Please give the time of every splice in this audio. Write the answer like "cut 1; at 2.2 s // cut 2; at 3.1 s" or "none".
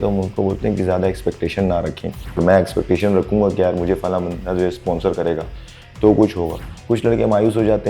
cut 1; at 2.4 s // cut 2; at 6.7 s